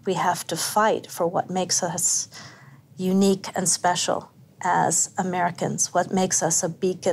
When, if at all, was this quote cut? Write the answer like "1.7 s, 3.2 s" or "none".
none